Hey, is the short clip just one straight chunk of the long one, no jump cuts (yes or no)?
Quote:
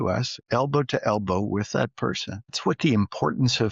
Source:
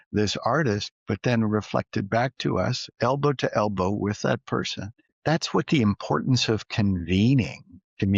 no